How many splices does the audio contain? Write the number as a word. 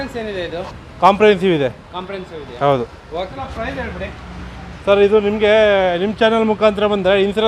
one